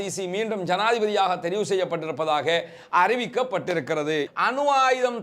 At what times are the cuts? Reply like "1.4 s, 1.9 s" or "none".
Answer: 4.3 s